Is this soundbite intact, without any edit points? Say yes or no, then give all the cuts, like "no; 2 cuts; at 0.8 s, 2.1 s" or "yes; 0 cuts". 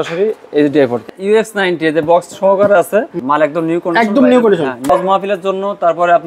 no; 3 cuts; at 1.0 s, 3.2 s, 4.9 s